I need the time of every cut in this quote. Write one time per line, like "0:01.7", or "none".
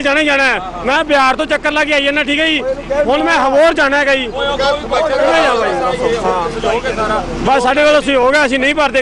none